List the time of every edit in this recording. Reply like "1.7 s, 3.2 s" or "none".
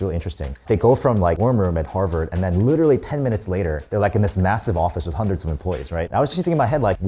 1.4 s